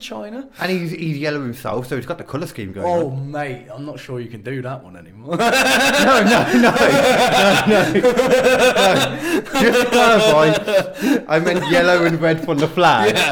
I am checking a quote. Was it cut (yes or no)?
no